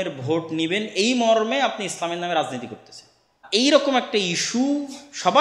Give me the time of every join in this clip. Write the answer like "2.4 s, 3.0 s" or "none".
3.5 s